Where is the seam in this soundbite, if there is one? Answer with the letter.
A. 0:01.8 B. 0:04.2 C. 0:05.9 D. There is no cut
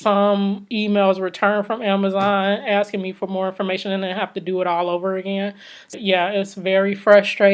C